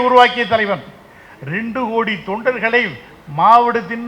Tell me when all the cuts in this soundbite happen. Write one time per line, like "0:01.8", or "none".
none